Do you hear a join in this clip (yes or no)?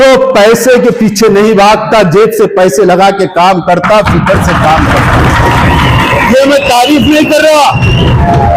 no